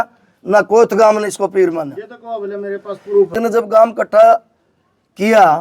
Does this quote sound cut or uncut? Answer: cut